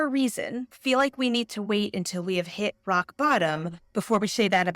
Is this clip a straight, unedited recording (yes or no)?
yes